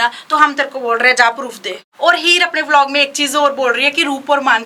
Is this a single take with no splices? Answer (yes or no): no